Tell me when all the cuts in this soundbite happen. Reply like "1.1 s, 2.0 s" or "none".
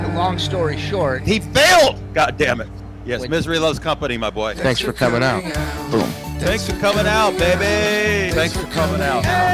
none